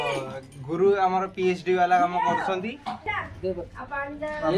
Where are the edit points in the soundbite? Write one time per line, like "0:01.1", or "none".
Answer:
0:03.2

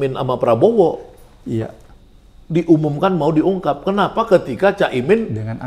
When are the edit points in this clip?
none

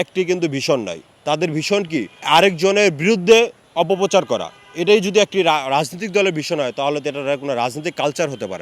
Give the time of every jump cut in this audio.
0:02.1

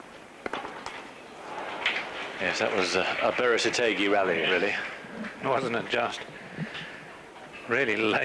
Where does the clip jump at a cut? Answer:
0:04.3

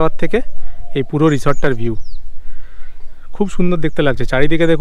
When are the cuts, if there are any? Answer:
none

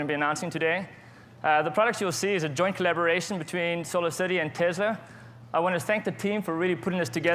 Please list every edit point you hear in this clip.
0:06.3

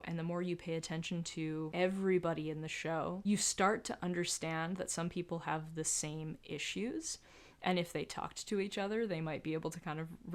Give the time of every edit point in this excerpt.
none

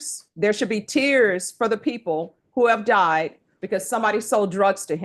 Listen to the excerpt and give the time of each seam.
none

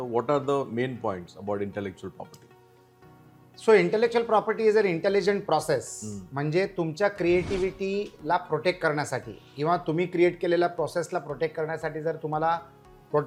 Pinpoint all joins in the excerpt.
none

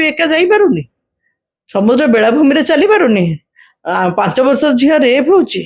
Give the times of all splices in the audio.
none

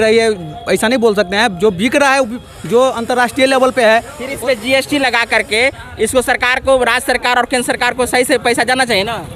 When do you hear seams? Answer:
none

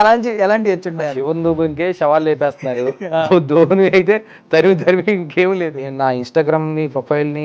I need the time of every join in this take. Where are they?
0:05.8

